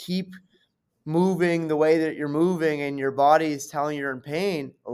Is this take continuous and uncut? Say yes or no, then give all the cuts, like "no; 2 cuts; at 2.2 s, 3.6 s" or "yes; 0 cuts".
yes; 0 cuts